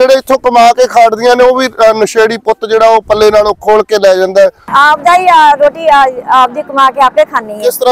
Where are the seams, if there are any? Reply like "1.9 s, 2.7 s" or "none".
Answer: 4.6 s